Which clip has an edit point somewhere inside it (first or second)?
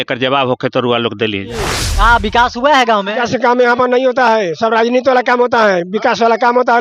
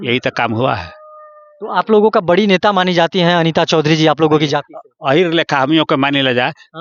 first